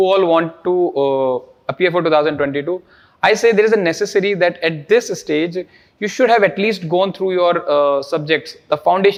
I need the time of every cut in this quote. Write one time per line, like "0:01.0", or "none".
none